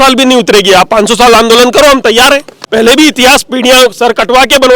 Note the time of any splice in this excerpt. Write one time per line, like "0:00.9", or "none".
0:02.6